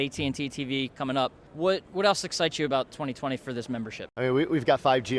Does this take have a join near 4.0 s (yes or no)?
yes